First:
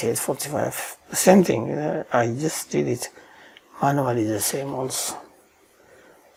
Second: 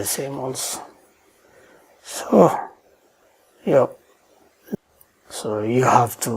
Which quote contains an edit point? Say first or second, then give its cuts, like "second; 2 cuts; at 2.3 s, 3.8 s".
second; 1 cut; at 4.8 s